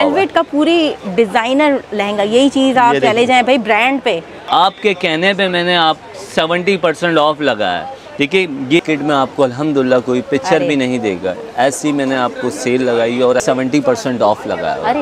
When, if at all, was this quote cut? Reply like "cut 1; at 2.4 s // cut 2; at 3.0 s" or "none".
cut 1; at 4.3 s // cut 2; at 8.8 s // cut 3; at 13.4 s